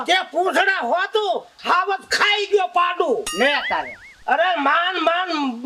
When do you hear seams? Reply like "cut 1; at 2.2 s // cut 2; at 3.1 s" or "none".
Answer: none